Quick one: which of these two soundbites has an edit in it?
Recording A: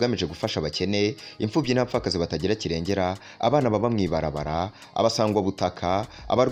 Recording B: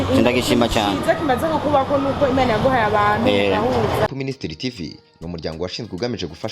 B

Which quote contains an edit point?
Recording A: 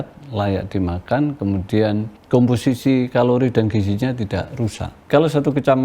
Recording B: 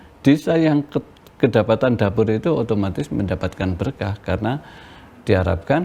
A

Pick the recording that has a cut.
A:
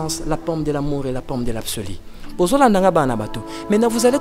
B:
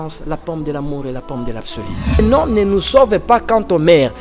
B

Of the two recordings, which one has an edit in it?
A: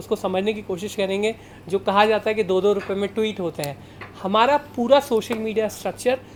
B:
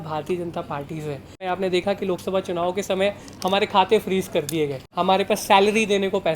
B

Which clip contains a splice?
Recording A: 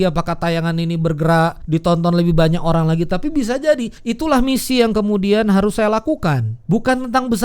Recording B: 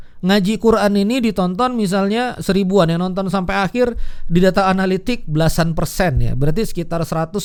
A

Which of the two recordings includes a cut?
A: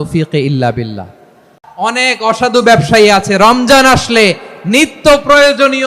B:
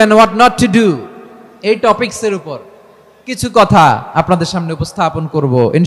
A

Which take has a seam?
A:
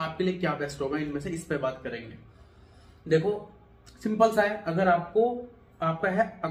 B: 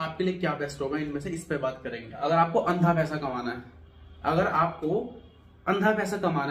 B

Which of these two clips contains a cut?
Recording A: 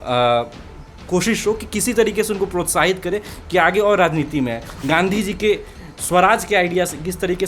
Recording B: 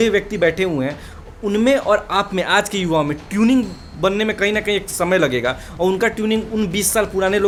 A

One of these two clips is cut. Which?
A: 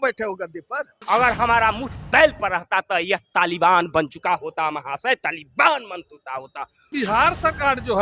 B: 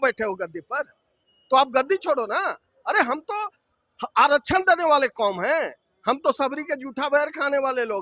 A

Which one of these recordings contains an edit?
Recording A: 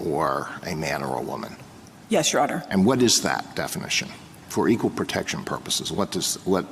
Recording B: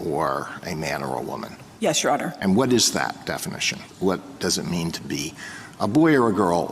B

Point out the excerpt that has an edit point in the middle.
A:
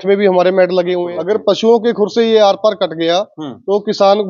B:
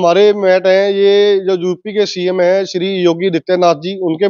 A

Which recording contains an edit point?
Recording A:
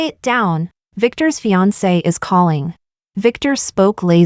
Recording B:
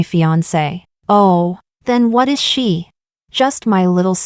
A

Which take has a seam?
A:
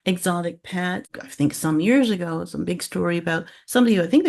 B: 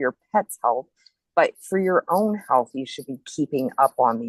A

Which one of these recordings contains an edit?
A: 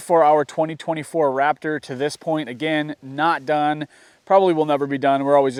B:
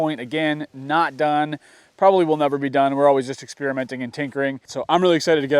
B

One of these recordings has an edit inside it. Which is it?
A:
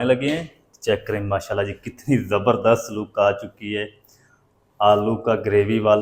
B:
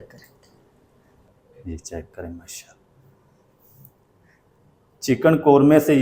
B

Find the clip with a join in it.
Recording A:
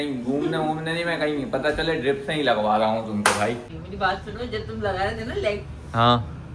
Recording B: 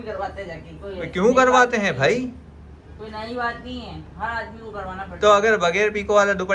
A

